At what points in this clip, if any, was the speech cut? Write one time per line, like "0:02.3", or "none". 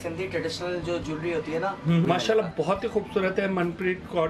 0:02.1